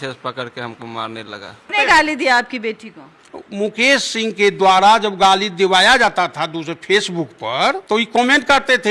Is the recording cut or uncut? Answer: cut